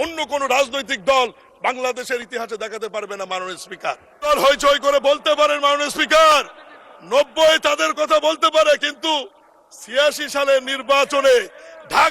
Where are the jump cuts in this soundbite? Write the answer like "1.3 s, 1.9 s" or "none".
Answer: 4.3 s

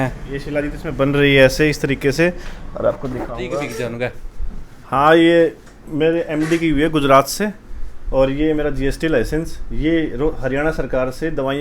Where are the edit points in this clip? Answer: 3.8 s

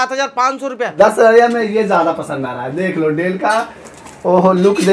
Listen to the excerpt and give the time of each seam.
0.9 s

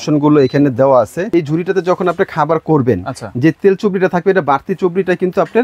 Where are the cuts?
1.3 s

